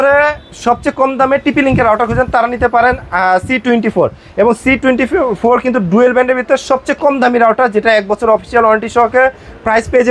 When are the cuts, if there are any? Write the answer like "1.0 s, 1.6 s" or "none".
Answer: none